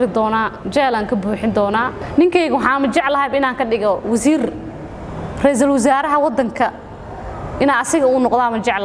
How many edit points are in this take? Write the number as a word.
one